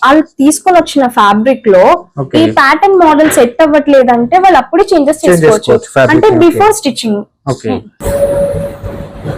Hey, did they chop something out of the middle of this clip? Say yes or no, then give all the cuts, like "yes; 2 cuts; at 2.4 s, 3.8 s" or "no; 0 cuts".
yes; 1 cut; at 7.9 s